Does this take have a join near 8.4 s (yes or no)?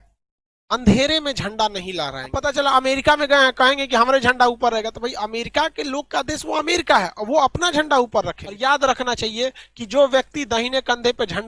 yes